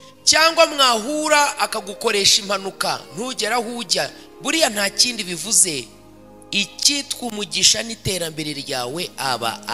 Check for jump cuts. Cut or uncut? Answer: uncut